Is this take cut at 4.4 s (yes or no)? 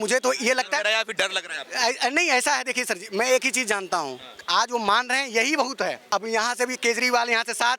no